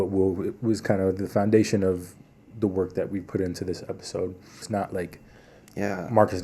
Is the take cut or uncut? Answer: cut